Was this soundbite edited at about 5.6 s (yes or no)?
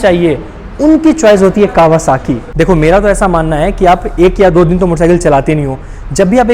no